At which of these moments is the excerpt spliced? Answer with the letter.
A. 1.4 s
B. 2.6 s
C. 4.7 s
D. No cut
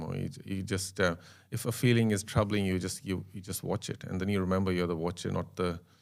D